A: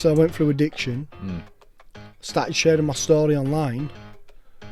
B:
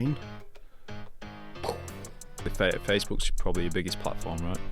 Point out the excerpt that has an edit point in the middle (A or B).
B